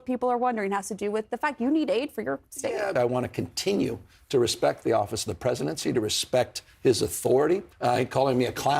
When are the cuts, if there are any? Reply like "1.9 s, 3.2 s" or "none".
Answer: 2.9 s, 7.7 s